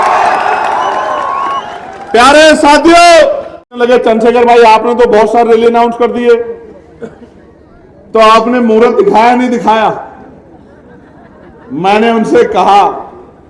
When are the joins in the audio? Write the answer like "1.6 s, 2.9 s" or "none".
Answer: 3.7 s